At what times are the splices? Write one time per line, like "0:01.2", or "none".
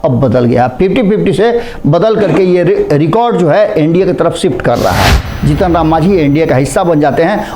0:05.3